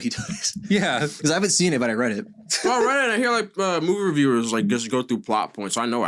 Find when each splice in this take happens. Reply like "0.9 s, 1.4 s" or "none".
2.5 s